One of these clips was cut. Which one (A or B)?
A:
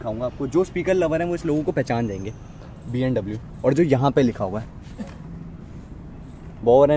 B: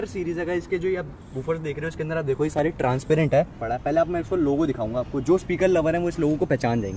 B